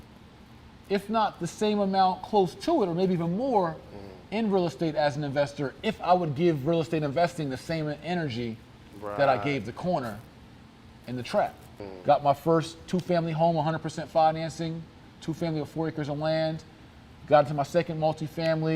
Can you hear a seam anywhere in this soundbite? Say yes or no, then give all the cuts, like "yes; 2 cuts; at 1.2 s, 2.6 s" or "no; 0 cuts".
yes; 1 cut; at 11.8 s